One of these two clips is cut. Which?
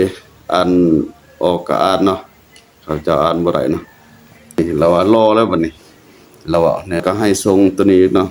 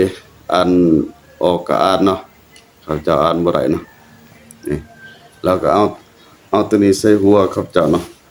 first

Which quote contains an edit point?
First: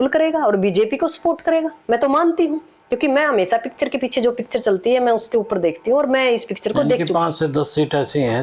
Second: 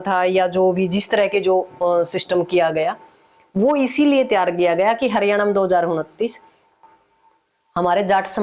second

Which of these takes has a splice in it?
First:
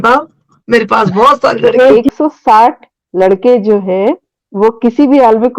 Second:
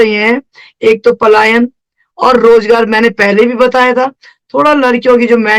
first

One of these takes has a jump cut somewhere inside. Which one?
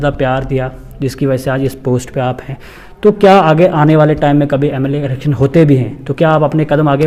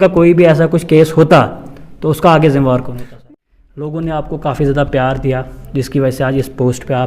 second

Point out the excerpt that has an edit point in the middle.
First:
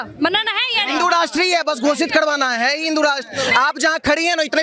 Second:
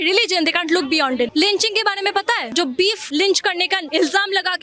second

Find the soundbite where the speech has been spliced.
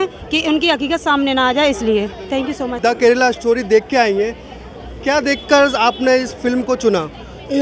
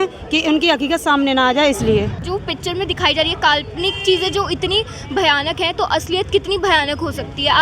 second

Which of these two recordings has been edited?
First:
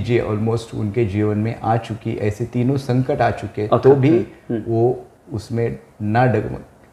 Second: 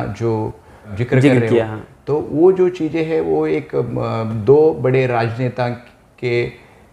second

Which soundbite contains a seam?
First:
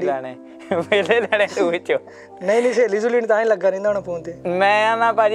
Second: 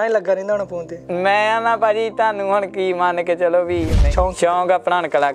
second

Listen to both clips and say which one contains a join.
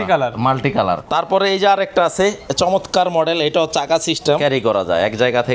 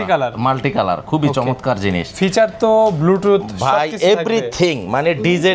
first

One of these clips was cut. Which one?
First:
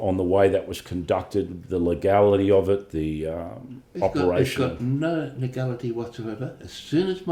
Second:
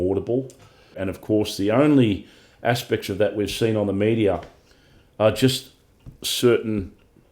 second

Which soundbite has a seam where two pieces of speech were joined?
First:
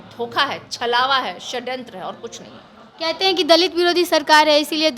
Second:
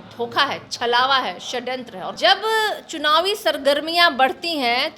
second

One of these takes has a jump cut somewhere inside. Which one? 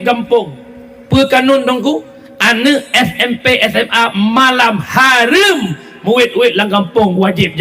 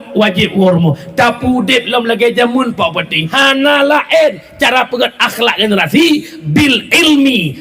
second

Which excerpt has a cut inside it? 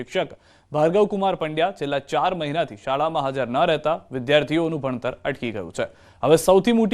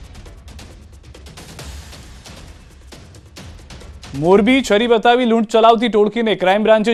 first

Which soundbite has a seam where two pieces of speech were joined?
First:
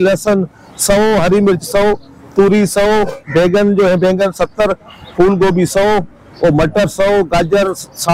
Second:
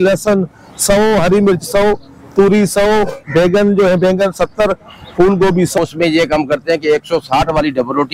second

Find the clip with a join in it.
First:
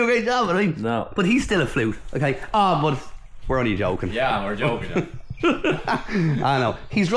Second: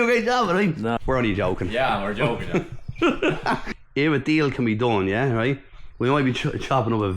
second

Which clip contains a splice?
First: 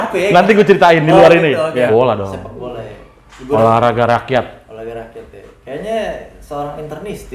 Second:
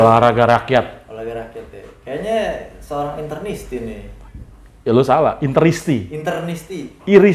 first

